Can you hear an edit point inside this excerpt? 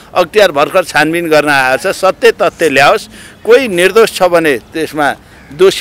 no; 0 cuts

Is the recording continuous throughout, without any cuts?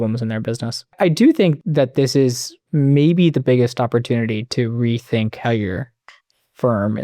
no; 2 cuts; at 0.9 s, 1.6 s

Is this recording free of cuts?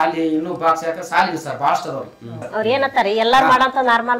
no; 1 cut; at 2.4 s

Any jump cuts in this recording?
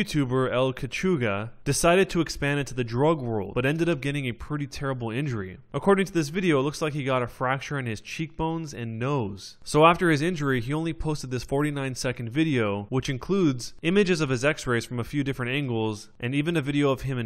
no; 0 cuts

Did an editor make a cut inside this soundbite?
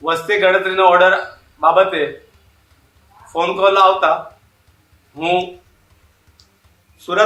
no; 0 cuts

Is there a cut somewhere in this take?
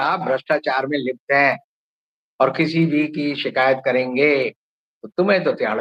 no; 0 cuts

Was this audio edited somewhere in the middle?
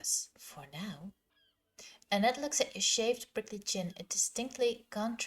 yes; 1 cut; at 1.2 s

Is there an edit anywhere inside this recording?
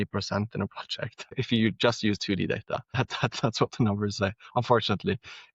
yes; 2 cuts; at 1.3 s, 2.9 s

